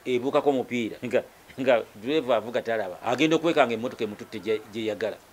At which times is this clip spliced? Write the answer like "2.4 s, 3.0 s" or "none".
1.0 s, 2.9 s